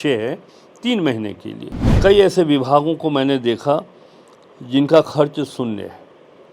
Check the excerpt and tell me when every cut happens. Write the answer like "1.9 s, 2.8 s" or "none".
2.0 s